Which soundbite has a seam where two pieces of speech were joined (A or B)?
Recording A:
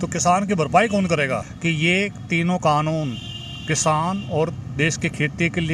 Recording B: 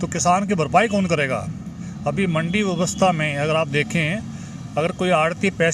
A